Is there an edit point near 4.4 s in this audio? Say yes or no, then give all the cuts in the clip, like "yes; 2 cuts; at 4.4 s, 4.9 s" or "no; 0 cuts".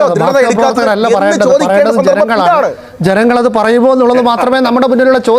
no; 0 cuts